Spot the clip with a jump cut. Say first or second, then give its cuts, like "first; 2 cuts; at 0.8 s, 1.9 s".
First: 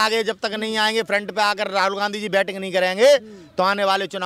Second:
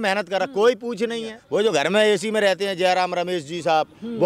second; 1 cut; at 1.3 s